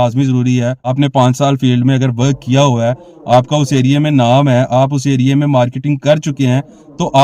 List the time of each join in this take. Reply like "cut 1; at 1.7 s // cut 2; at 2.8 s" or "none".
cut 1; at 0.9 s